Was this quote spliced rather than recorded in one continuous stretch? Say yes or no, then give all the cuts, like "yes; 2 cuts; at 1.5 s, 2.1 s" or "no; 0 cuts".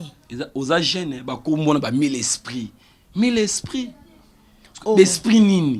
no; 0 cuts